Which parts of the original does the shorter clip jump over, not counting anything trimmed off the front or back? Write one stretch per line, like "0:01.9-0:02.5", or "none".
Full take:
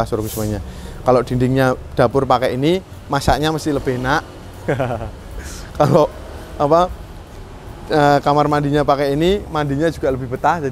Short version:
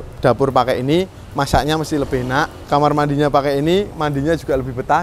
0:04.4-0:08.2